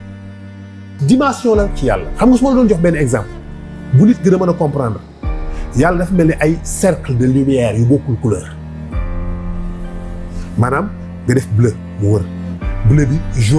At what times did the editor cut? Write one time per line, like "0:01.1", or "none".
0:00.9